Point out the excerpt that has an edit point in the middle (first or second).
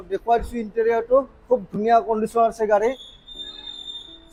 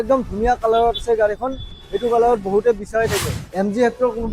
second